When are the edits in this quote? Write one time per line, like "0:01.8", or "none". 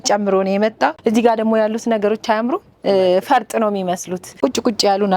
0:01.0
0:04.3